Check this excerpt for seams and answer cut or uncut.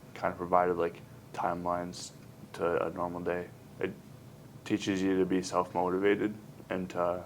cut